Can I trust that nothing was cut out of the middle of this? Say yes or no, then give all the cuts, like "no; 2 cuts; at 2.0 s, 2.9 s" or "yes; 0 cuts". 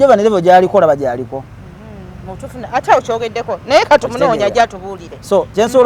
yes; 0 cuts